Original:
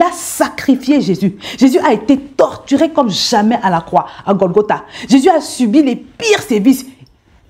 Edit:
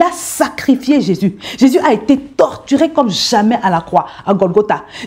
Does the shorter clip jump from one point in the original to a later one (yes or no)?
no